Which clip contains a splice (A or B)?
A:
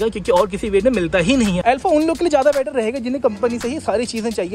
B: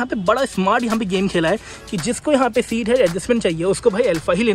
A